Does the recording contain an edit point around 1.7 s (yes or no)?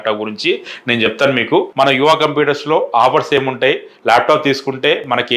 yes